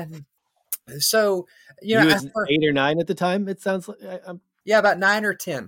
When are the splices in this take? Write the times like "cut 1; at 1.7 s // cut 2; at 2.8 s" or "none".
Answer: cut 1; at 4.5 s